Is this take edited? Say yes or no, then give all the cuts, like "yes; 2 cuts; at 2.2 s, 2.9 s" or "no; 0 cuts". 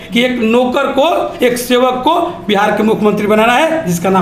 no; 0 cuts